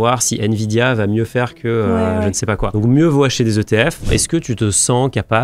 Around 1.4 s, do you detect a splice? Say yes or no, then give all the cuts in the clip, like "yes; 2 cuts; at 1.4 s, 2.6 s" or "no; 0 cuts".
no; 2 cuts; at 2.7 s, 4.1 s